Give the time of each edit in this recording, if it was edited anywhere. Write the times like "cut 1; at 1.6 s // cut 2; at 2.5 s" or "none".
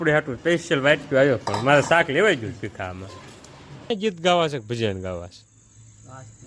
cut 1; at 3.9 s